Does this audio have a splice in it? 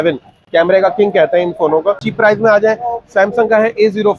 yes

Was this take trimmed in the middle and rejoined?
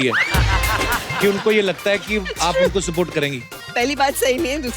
yes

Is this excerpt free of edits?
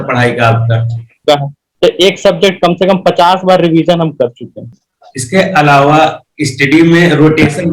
no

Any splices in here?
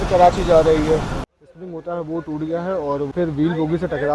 yes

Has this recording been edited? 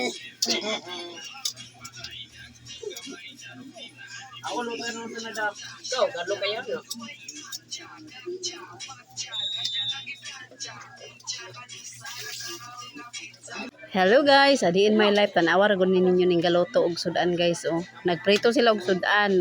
yes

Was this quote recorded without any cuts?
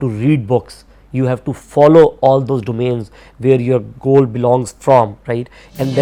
yes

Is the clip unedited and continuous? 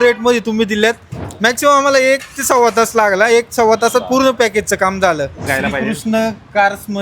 no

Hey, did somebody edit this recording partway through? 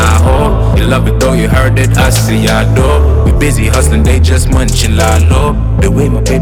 no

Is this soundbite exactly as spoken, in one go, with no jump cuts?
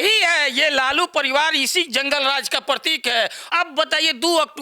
no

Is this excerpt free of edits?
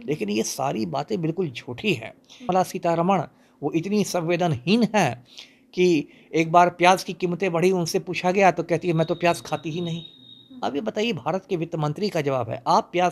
no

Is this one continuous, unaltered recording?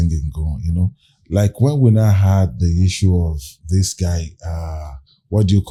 yes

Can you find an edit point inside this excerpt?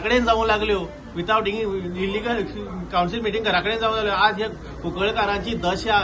no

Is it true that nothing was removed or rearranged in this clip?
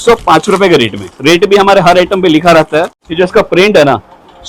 no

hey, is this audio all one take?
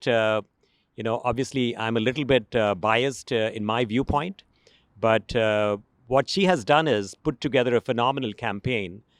yes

